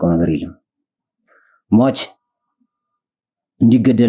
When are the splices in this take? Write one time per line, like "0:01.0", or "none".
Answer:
none

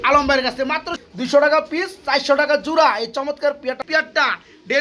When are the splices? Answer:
0:00.9
0:03.8

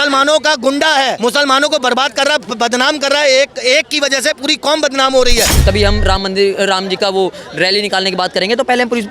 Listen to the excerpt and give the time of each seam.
0:01.2
0:05.5

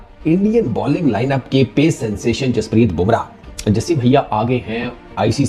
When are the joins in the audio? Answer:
none

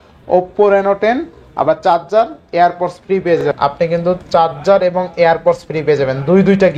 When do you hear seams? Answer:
0:03.4

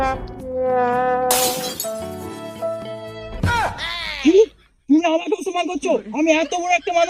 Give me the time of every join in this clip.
0:03.3

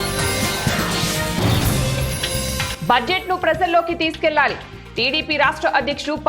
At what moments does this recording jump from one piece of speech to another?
0:02.7

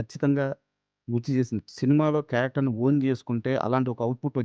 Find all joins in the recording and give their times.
0:01.6

